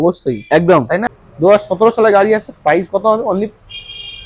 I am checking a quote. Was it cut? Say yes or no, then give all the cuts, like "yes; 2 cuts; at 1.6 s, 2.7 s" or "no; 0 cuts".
yes; 1 cut; at 1.2 s